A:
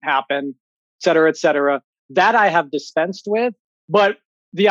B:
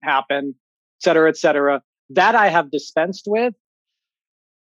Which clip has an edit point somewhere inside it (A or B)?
A